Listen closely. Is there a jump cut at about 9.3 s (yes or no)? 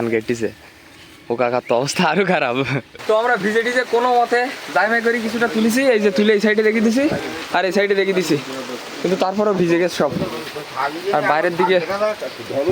no